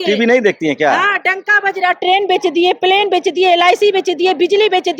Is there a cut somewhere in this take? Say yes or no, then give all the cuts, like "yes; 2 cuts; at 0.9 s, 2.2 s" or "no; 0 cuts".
no; 0 cuts